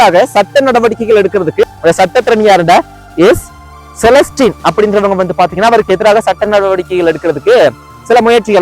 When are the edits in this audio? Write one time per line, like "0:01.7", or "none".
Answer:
0:01.7